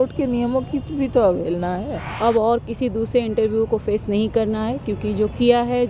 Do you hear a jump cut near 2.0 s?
yes; 1 cut; at 2.0 s

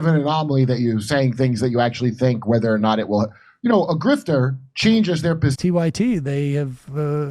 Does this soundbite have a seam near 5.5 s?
yes; 1 cut; at 5.5 s

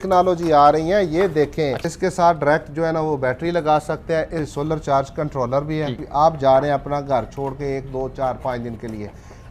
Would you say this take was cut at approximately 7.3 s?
no; 3 cuts; at 1.8 s, 4.6 s, 6.0 s

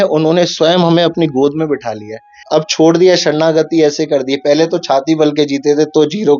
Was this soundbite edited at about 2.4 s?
yes; 1 cut; at 2.4 s

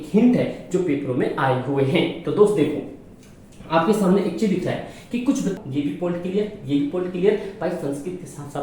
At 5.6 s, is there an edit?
yes; 1 cut; at 5.6 s

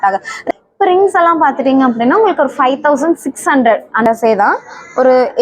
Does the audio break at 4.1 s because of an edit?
yes; 1 cut; at 4.1 s

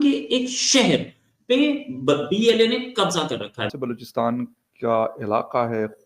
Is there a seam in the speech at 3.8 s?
yes; 1 cut; at 3.8 s

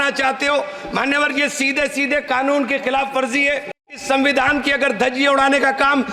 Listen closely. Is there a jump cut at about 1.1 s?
no; 1 cut; at 3.9 s

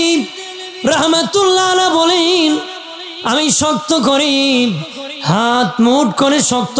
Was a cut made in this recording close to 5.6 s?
no; 0 cuts

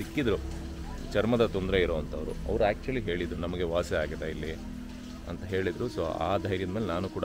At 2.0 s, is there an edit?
no; 0 cuts

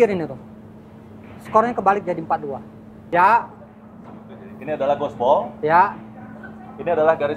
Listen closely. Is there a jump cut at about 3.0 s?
yes; 1 cut; at 3.0 s

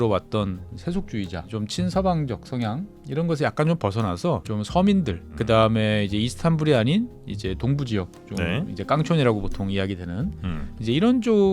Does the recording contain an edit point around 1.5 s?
yes; 4 cuts; at 1.5 s, 2.9 s, 4.4 s, 5.3 s

